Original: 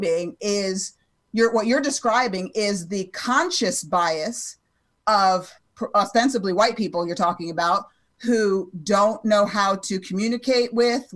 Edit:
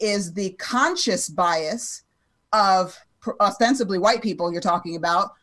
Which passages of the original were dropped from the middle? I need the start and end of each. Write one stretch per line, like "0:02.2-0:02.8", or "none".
none